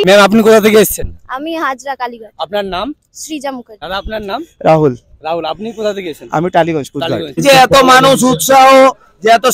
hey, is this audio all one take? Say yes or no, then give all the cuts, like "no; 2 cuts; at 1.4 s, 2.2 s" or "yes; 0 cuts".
no; 2 cuts; at 3.7 s, 7.4 s